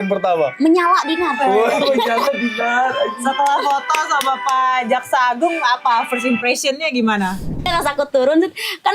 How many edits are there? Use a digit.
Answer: 1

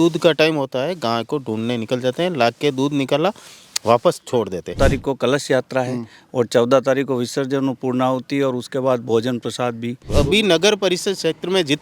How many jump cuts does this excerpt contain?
2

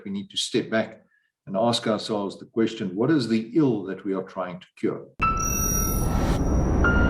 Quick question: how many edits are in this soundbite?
1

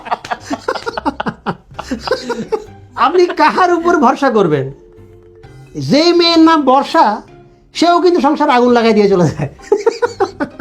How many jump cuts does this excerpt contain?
1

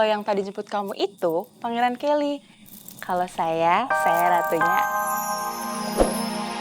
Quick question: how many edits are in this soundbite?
1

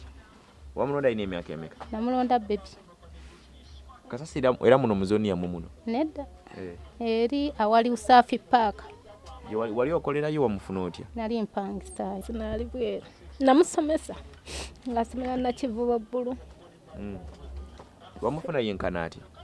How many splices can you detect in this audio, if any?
1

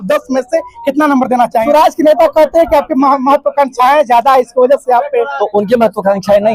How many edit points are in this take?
1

